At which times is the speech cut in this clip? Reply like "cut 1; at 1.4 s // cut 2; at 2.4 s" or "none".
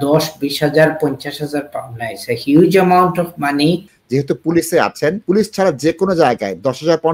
cut 1; at 3.9 s // cut 2; at 5.2 s